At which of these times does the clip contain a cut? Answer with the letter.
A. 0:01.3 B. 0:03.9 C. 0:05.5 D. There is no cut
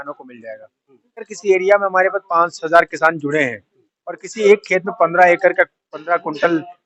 A